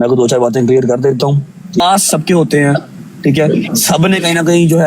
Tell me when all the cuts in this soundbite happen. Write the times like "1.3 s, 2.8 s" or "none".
1.8 s